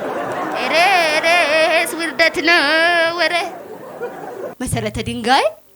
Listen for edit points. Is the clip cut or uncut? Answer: cut